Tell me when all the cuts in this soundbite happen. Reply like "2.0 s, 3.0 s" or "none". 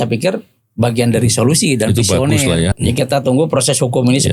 2.7 s